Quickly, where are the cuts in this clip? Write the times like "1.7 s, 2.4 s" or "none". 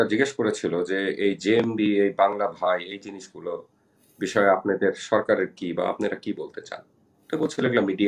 none